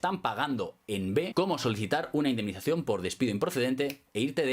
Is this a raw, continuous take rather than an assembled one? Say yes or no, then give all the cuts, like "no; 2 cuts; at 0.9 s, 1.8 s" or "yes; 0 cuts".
no; 1 cut; at 1.3 s